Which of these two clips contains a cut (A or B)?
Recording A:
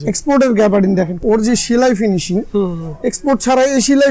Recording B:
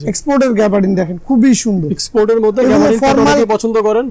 A